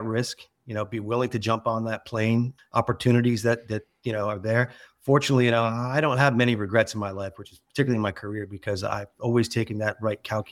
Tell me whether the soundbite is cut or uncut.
uncut